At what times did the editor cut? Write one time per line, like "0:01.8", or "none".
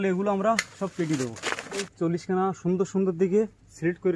0:01.9